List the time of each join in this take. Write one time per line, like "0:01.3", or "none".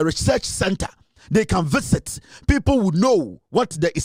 none